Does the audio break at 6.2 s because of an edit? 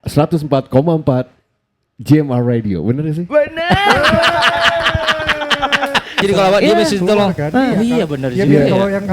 yes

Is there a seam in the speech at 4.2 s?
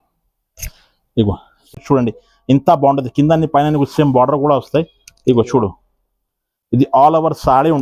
no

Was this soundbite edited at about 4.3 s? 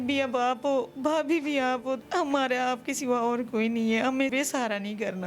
yes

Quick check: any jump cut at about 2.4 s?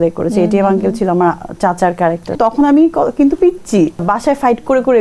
yes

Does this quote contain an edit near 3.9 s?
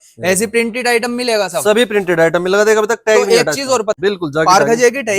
yes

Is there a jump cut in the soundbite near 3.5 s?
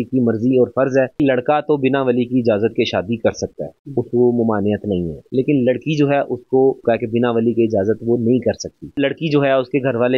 no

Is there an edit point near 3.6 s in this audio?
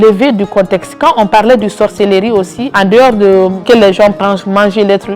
yes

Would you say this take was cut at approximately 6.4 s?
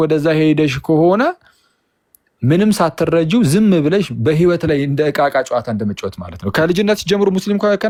no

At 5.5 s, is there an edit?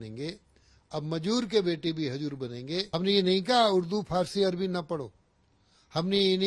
no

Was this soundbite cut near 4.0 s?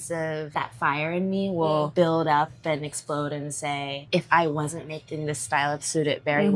yes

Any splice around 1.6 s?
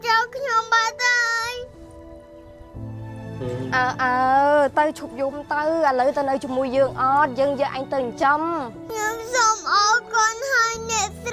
no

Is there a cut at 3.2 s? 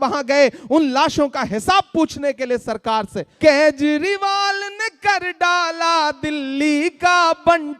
yes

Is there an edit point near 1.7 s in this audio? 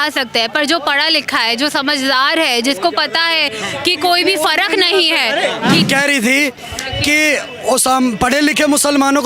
no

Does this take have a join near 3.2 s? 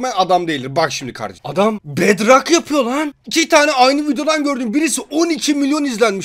no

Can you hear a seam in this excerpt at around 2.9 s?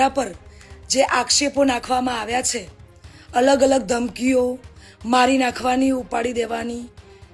no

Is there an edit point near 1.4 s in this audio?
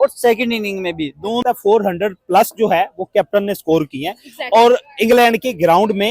yes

